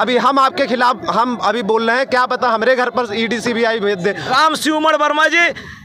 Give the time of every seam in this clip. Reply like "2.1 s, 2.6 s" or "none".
4.2 s